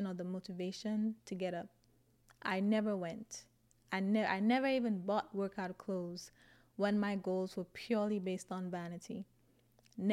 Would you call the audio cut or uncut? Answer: uncut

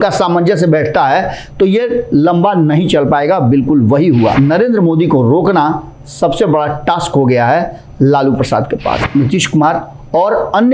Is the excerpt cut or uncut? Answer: cut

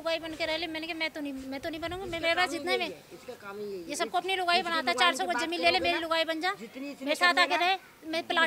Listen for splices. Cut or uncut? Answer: uncut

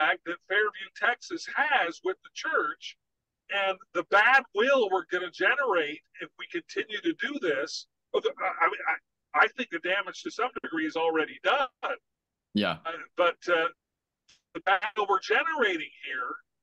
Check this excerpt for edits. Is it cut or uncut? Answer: uncut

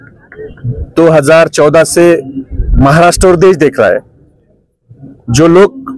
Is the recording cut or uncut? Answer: uncut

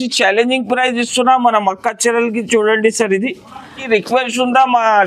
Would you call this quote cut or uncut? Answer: cut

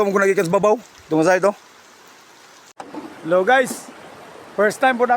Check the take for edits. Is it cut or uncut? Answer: cut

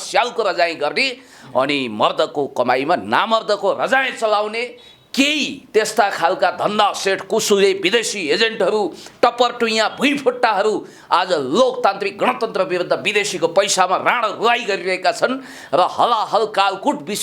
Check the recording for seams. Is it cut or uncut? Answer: uncut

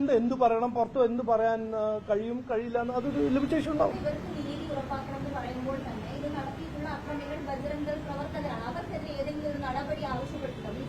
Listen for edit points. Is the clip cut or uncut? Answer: uncut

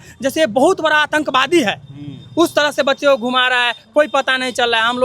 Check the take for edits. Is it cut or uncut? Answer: uncut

